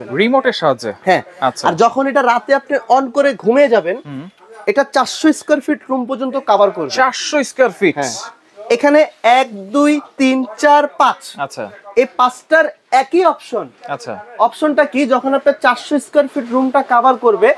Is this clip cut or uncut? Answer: uncut